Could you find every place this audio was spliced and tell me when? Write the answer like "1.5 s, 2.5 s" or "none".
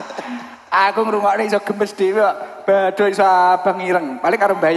none